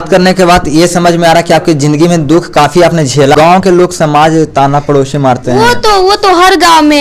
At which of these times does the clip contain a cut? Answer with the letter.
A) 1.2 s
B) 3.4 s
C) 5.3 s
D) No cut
B